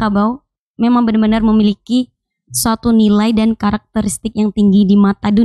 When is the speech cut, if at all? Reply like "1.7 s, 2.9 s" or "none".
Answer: none